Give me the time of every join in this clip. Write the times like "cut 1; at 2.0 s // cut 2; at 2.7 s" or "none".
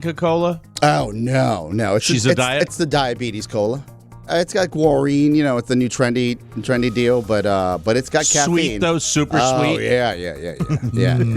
cut 1; at 4.3 s